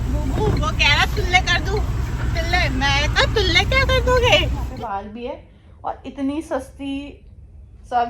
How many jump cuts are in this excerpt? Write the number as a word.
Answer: one